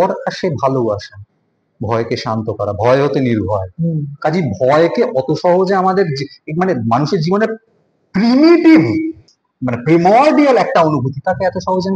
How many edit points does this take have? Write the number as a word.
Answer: zero